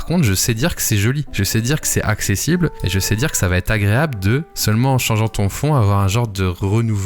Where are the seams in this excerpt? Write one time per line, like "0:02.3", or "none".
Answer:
none